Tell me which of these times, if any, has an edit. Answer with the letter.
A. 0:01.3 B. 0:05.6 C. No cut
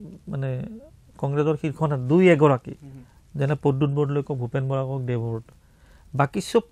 C